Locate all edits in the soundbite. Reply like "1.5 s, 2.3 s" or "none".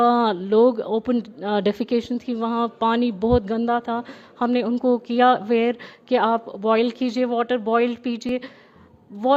none

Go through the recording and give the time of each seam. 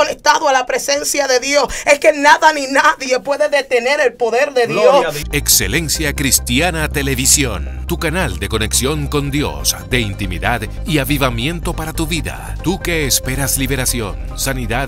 5.2 s

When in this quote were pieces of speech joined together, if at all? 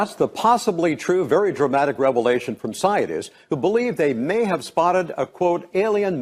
1.0 s

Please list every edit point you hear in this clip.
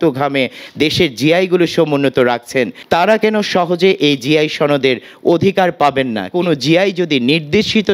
2.8 s, 6.3 s

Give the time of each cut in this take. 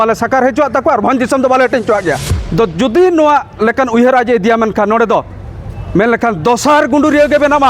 2.3 s

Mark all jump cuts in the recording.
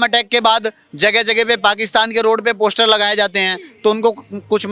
none

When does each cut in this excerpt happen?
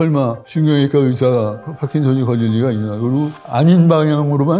none

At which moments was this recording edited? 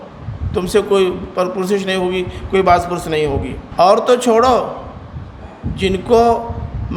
3.6 s

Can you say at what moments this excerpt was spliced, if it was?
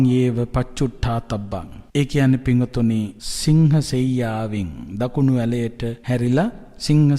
1.8 s, 3.2 s, 6.0 s

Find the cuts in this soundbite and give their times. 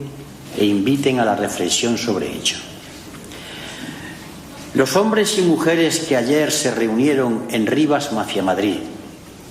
5.1 s

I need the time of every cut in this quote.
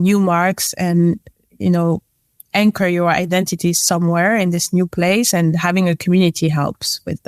none

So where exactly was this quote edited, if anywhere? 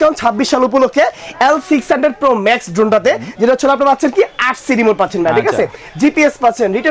none

